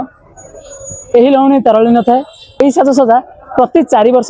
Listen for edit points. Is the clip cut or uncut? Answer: cut